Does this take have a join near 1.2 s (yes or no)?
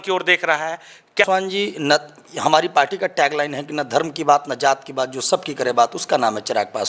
yes